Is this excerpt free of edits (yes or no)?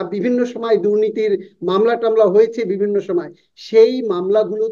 yes